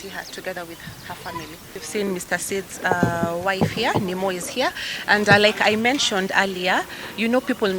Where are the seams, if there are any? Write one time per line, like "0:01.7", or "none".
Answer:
0:01.8